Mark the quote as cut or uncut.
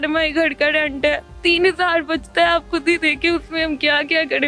cut